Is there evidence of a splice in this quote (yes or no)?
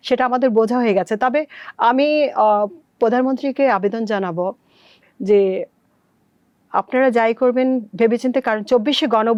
no